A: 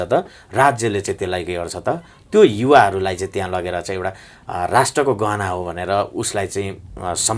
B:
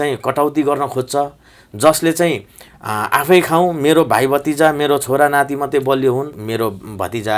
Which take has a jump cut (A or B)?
B